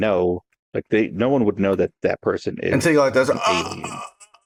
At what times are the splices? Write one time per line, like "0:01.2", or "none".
none